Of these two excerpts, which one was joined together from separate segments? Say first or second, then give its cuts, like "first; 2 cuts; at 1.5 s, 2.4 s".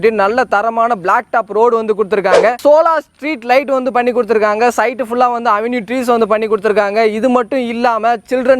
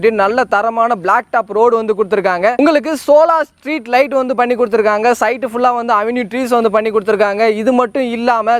first; 1 cut; at 2.5 s